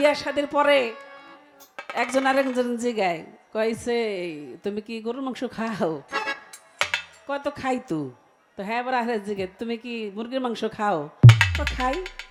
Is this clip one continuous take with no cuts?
yes; 0 cuts

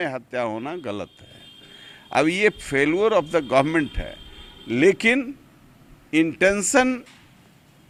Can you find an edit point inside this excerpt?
no; 0 cuts

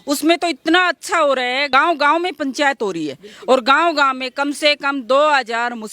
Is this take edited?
yes; 1 cut; at 1.7 s

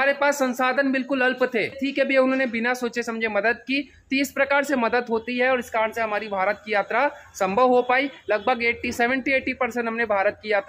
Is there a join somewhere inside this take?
yes; 1 cut; at 1.8 s

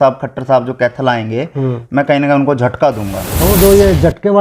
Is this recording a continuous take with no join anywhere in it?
no; 1 cut; at 3.3 s

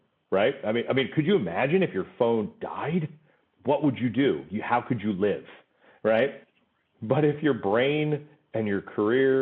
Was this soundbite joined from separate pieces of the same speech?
yes; 1 cut; at 6.5 s

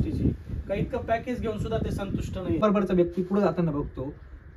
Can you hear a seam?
yes; 1 cut; at 2.6 s

